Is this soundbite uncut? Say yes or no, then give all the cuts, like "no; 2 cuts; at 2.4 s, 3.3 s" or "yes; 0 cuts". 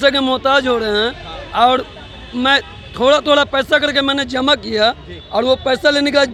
yes; 0 cuts